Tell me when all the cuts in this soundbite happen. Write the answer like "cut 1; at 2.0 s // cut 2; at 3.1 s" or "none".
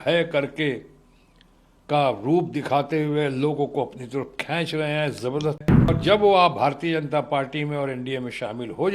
cut 1; at 5.9 s